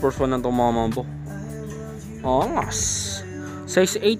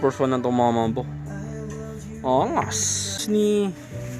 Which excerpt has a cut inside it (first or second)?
second